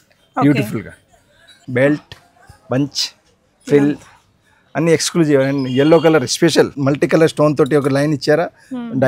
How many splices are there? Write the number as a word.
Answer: two